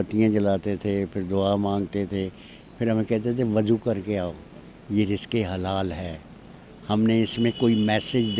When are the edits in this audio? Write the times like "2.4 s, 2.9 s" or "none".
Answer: none